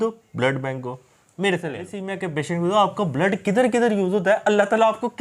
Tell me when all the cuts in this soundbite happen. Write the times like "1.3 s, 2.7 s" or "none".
2.0 s